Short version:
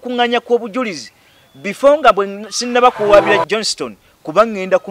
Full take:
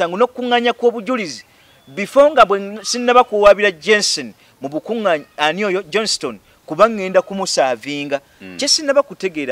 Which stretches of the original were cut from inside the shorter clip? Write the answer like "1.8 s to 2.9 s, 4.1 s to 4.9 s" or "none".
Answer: 3.8 s to 5.9 s